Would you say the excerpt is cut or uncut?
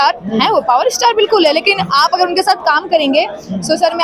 uncut